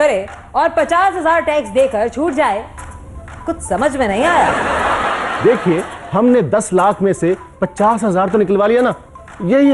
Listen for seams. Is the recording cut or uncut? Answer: uncut